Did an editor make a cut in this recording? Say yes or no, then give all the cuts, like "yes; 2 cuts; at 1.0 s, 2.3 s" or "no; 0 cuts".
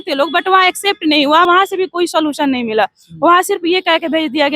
yes; 1 cut; at 1.5 s